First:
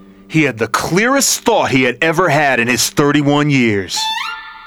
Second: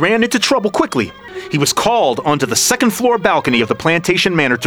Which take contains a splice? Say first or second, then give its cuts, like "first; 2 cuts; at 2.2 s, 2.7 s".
second; 1 cut; at 1.2 s